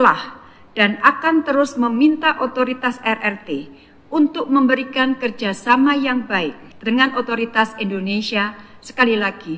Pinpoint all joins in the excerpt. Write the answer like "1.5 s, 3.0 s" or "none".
6.7 s

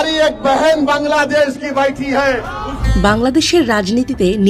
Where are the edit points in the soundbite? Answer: 2.8 s

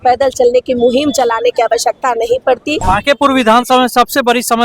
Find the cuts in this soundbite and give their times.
2.8 s

